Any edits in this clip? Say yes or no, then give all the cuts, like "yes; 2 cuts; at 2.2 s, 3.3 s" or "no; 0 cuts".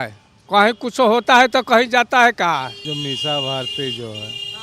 yes; 1 cut; at 2.9 s